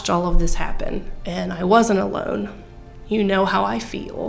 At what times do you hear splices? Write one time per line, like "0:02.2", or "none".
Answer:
0:01.2